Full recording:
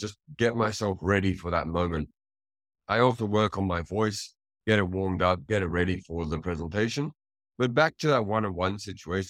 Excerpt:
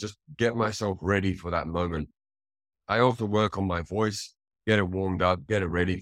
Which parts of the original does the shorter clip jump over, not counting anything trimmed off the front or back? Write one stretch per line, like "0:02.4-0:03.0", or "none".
none